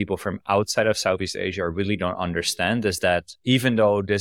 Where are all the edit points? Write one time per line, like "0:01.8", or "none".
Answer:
none